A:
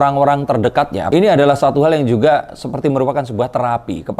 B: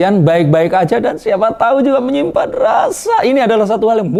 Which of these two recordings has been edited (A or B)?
A